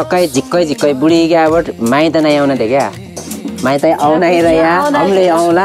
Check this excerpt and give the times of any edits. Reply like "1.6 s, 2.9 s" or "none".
none

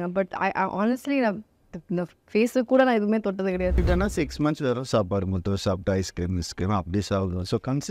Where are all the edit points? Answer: 3.8 s

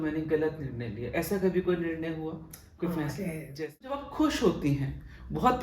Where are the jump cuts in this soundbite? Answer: 4.1 s

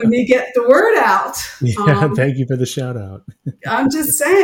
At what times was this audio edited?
none

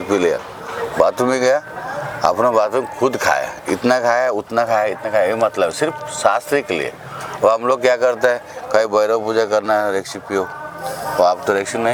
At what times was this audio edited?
none

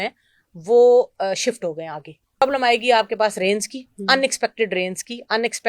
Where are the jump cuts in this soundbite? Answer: 2.4 s

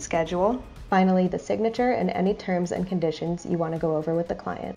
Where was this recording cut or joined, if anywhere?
none

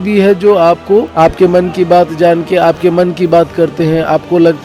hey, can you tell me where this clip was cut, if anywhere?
1.1 s

